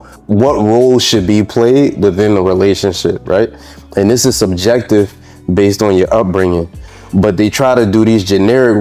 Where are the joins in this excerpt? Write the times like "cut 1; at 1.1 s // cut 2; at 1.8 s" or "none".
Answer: none